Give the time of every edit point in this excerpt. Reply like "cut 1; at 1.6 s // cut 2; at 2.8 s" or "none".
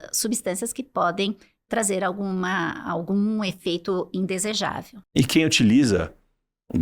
cut 1; at 5.1 s